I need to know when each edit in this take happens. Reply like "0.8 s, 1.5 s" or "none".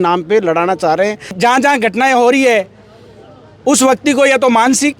1.3 s

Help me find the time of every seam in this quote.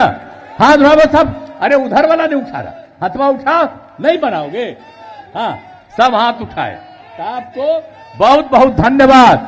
none

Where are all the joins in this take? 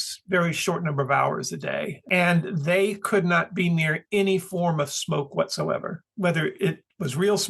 1.8 s

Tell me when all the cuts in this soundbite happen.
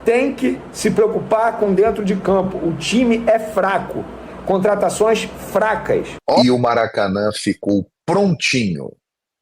6.4 s

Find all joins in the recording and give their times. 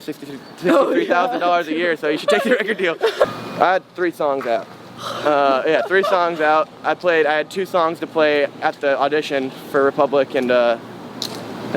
3.2 s

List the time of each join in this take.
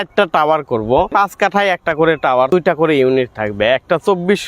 1.1 s, 2.5 s

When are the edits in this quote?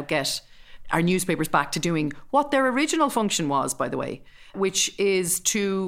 4.5 s

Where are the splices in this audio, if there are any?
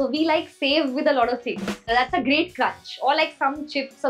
1.9 s

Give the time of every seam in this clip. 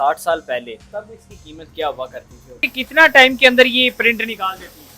2.6 s

